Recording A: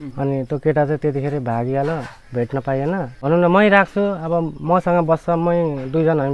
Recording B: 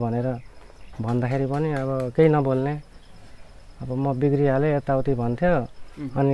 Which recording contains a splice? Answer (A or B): A